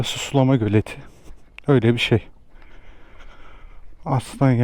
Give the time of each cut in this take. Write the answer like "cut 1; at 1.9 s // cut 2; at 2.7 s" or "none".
none